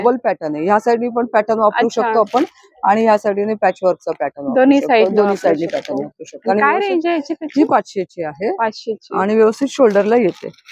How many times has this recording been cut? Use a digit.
0